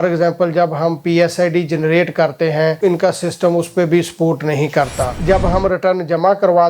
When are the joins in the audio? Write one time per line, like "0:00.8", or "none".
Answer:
0:02.8
0:05.2